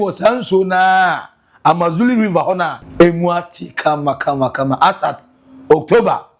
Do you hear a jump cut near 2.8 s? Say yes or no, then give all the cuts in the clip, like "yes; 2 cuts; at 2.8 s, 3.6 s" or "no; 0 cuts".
yes; 1 cut; at 2.8 s